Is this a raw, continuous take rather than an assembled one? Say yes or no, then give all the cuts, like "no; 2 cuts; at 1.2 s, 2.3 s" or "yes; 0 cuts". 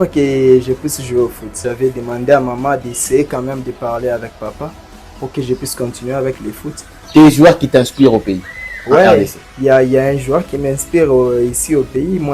no; 2 cuts; at 1.7 s, 7.0 s